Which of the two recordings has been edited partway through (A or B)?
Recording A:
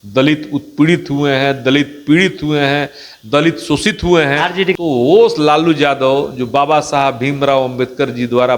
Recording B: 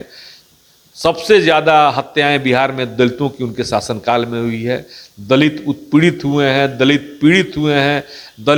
A